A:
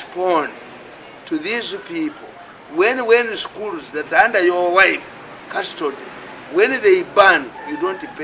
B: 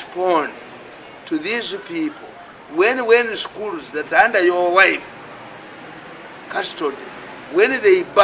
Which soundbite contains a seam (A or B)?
A